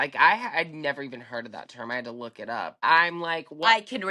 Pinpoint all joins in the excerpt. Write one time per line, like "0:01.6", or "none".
0:02.8